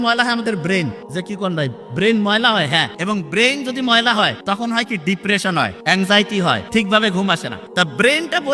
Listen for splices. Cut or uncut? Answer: cut